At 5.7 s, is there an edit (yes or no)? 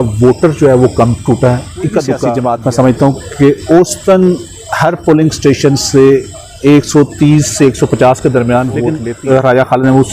no